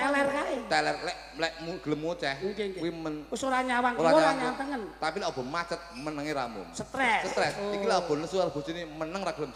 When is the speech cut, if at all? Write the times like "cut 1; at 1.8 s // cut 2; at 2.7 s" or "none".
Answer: none